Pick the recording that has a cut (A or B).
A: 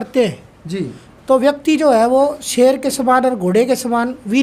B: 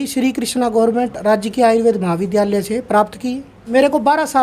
B